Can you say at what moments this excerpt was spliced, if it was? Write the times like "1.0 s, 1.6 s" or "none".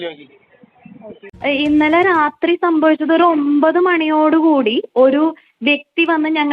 1.3 s